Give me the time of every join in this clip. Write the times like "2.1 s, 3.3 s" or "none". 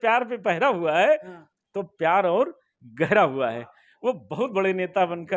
none